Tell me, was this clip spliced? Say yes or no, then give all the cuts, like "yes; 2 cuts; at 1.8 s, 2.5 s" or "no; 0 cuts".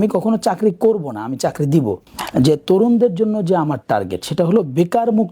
yes; 1 cut; at 2.1 s